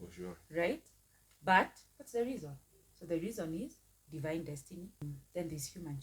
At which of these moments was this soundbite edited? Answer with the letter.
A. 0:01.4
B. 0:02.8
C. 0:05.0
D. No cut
C